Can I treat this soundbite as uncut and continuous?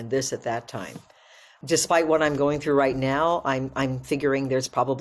no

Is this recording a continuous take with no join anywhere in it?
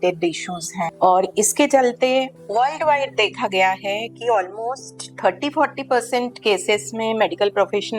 no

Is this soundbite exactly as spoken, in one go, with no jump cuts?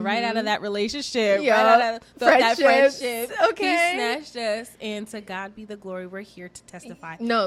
yes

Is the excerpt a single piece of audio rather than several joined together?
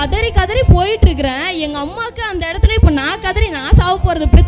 yes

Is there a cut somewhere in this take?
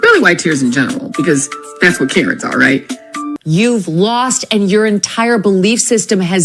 yes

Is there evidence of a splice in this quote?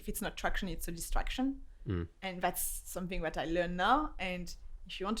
no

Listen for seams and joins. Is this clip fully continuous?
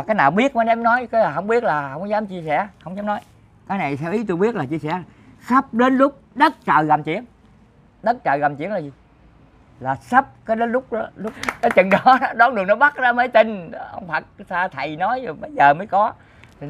no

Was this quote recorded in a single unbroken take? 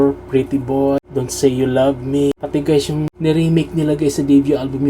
no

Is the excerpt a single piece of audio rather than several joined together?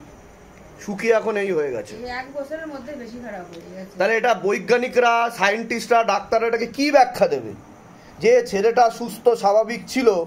yes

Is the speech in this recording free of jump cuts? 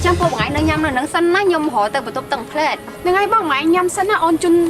yes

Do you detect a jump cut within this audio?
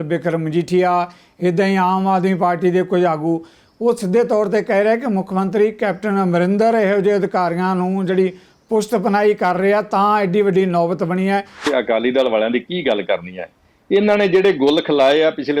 yes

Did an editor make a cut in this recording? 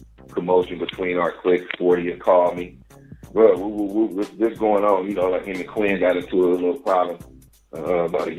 no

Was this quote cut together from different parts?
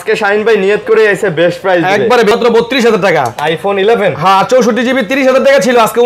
yes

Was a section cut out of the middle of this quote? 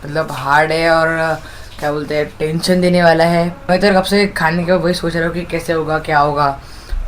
yes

